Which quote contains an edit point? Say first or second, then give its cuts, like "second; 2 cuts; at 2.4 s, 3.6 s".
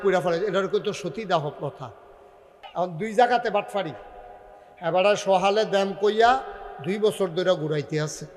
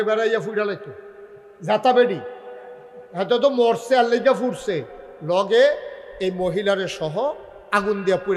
first; 1 cut; at 2.6 s